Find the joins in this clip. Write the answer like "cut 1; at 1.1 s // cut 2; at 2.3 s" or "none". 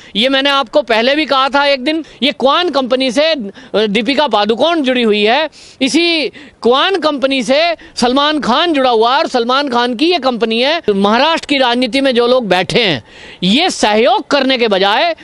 cut 1; at 2.1 s // cut 2; at 10.8 s